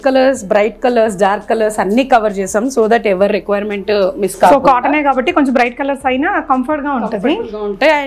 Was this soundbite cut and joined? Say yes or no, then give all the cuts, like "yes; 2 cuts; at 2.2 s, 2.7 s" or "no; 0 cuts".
no; 0 cuts